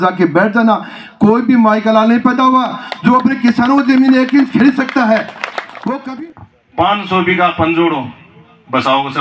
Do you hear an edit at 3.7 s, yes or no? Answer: no